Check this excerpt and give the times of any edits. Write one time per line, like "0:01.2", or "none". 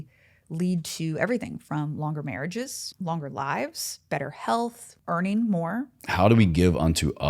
0:02.8
0:04.9
0:06.0